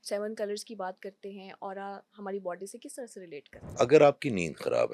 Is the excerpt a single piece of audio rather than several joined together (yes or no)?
no